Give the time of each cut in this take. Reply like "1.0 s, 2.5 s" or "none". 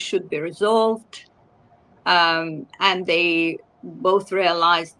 none